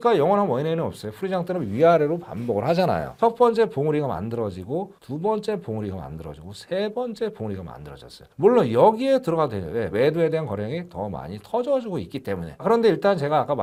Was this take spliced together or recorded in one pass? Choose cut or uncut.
uncut